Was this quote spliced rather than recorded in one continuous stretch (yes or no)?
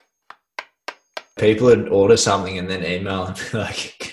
yes